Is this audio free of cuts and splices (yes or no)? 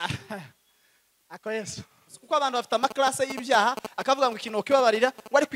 no